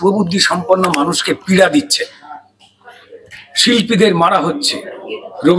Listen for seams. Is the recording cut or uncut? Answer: uncut